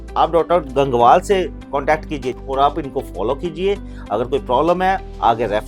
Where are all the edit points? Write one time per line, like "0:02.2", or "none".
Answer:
0:02.3